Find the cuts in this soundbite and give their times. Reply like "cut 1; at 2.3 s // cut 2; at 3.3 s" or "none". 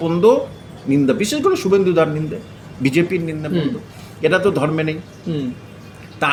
none